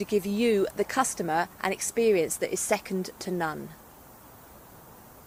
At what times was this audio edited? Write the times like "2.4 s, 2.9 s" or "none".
none